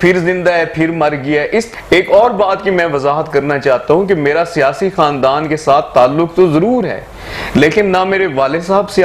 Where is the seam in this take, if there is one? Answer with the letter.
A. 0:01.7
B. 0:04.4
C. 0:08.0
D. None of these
A